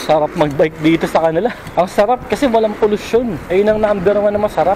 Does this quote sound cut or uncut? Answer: cut